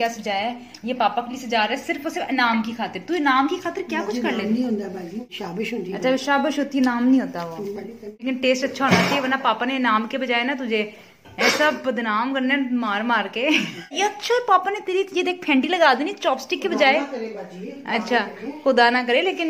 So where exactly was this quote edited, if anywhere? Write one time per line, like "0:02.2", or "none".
0:05.4
0:08.1
0:13.9